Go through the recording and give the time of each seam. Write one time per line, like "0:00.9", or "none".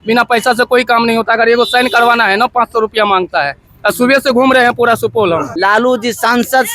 0:05.5